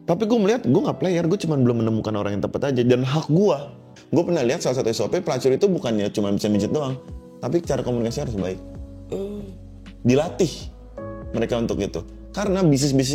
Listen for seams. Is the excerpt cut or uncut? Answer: cut